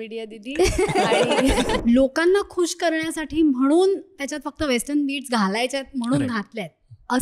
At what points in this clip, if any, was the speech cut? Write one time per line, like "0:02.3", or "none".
0:01.8